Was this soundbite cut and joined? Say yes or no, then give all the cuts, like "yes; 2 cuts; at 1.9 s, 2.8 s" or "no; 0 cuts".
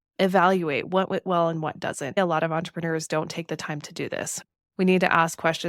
yes; 2 cuts; at 2.2 s, 4.4 s